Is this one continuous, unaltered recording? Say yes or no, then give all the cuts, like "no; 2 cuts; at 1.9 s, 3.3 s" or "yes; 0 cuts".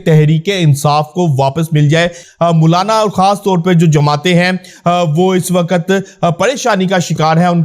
no; 1 cut; at 2.2 s